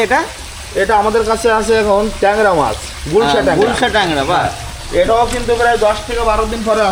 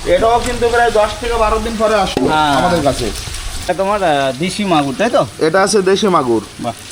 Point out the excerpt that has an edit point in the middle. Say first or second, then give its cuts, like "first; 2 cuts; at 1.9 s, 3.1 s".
second; 1 cut; at 3.6 s